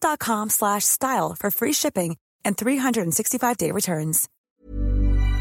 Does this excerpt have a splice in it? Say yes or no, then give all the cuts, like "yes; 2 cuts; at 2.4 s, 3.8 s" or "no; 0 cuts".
yes; 1 cut; at 4.3 s